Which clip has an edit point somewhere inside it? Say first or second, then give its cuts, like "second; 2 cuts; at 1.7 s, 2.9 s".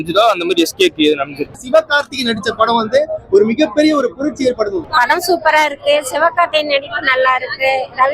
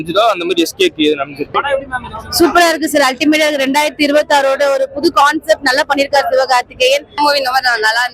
first; 1 cut; at 1.4 s